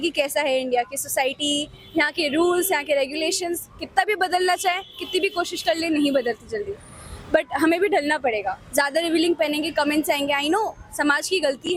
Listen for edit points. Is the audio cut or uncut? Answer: uncut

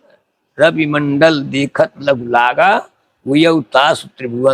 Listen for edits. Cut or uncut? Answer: uncut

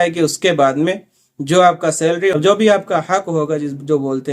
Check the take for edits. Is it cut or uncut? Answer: cut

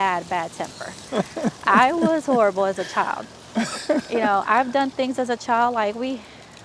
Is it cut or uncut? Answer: uncut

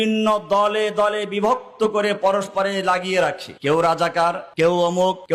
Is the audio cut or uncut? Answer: uncut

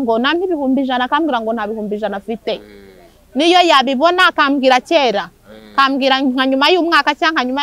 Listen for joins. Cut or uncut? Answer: uncut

